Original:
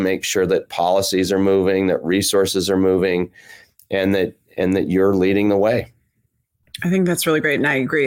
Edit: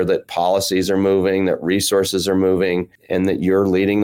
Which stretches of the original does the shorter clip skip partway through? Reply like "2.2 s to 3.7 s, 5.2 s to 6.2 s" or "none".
3.4 s to 4.4 s